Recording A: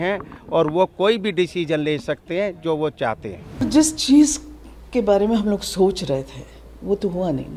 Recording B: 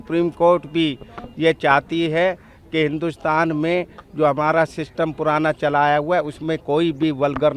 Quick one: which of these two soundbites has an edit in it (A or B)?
A